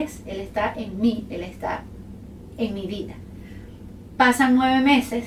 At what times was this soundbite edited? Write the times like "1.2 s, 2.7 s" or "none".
none